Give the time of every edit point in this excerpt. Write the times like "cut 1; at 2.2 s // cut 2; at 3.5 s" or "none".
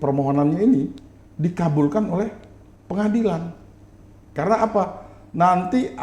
cut 1; at 4.3 s